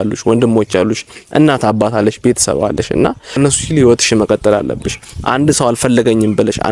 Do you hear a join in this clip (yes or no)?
yes